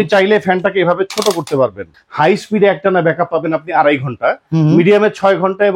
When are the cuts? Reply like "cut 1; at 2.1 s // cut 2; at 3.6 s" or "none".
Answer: cut 1; at 1.9 s